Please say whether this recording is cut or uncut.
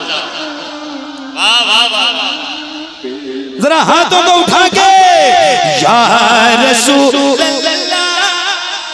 uncut